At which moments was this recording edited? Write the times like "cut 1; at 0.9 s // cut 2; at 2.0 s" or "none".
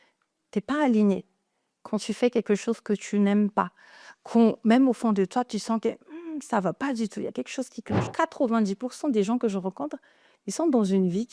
cut 1; at 8.1 s